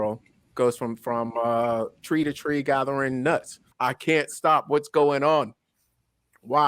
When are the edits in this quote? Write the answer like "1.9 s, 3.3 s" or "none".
3.7 s